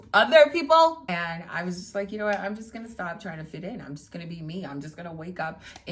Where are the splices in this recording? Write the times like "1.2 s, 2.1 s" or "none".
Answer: 1.0 s